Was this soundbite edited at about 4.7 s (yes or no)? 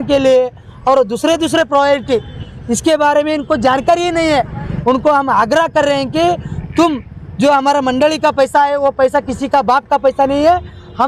yes